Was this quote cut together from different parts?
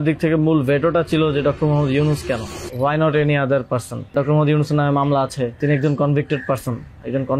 yes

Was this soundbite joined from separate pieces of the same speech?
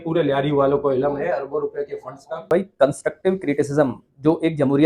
yes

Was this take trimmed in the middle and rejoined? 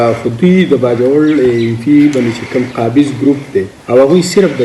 yes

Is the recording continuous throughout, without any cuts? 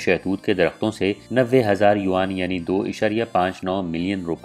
no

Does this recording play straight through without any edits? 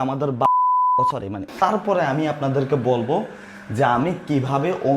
no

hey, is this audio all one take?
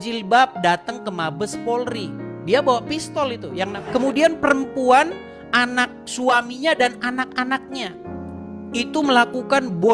no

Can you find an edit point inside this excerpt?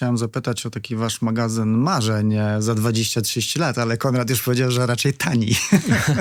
no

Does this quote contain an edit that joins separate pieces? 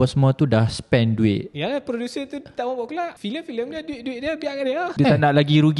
yes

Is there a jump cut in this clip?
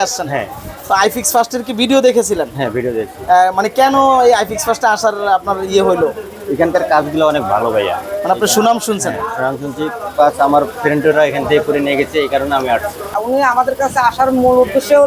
yes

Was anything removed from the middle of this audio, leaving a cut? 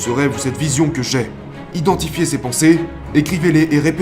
yes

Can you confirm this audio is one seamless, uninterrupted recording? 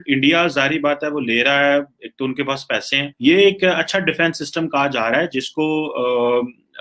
no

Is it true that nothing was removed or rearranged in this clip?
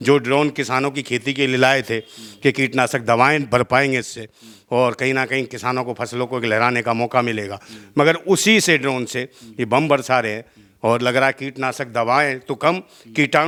yes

